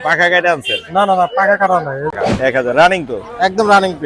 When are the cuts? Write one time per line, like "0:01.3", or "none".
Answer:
0:02.1